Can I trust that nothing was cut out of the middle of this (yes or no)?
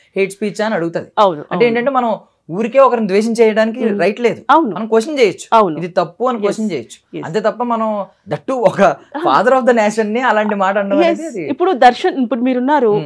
yes